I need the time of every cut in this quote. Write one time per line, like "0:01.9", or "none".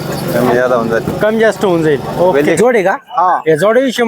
0:02.6